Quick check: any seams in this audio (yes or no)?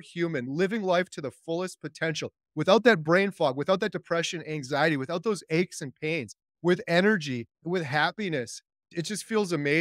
yes